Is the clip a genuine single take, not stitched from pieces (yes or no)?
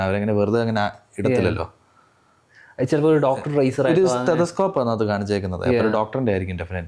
yes